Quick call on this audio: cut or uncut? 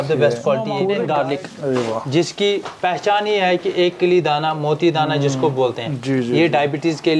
cut